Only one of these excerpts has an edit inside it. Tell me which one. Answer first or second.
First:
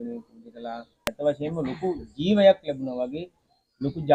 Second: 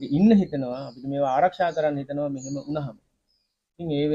first